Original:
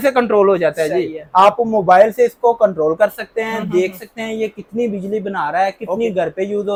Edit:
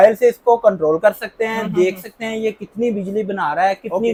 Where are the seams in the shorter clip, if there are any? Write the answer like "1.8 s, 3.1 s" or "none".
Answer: none